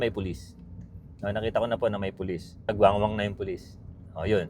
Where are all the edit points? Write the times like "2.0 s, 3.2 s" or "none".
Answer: 2.7 s